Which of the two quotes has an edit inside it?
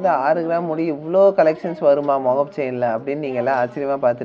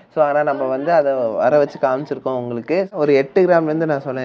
second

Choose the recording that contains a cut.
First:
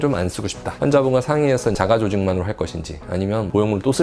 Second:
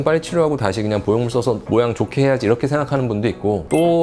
first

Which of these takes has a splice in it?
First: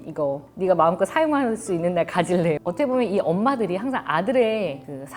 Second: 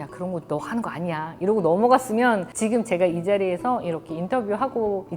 first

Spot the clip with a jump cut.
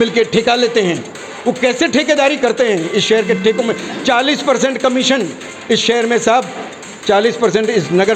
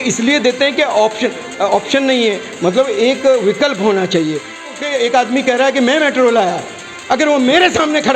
second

